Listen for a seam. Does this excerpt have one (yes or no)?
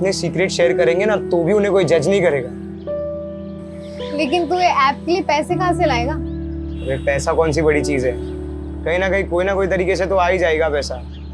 no